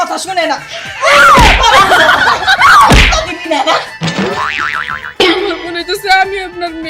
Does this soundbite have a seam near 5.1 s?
yes; 1 cut; at 5.1 s

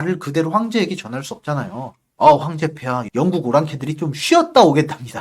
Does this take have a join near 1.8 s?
no; 1 cut; at 3.0 s

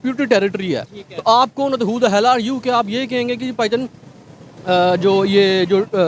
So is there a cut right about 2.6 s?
no; 0 cuts

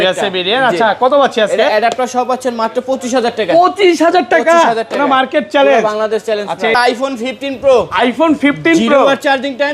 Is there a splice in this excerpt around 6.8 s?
yes; 1 cut; at 6.8 s

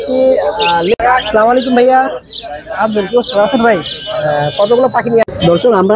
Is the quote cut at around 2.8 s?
no; 2 cuts; at 0.9 s, 5.2 s

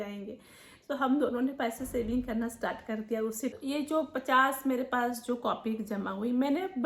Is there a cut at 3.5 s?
yes; 1 cut; at 3.5 s

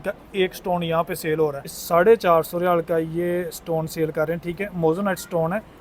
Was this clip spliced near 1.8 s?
yes; 1 cut; at 1.8 s

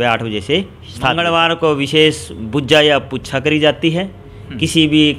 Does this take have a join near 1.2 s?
yes; 1 cut; at 1.2 s

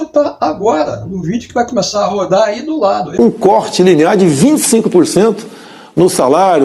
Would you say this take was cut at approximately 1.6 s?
no; 1 cut; at 3.1 s

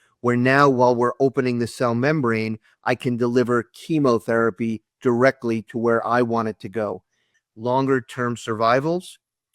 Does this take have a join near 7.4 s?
yes; 1 cut; at 7.4 s

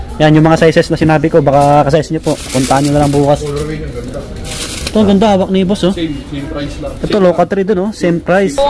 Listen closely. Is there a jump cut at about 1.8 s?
no; 1 cut; at 6.9 s

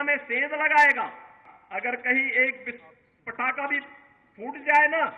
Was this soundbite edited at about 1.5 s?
yes; 1 cut; at 1.5 s

